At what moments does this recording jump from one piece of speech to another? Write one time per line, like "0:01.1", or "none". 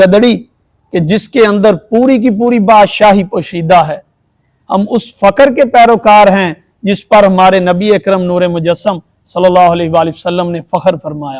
none

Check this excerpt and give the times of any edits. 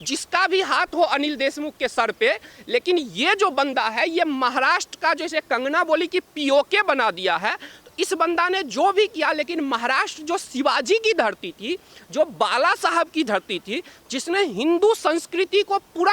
none

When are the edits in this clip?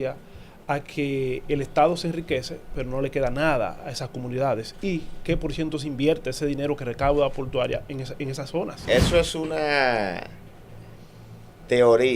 0:08.8

